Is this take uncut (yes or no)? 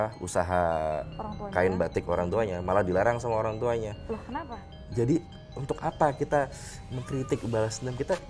no